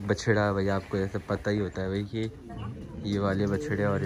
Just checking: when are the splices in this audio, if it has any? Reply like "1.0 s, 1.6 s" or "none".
none